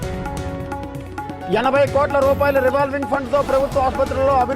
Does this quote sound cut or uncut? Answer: cut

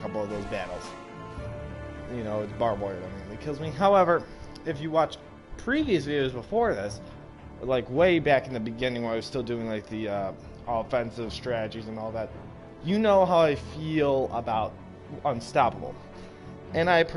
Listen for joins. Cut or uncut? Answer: cut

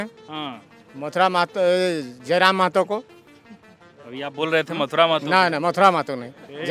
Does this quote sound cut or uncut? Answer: uncut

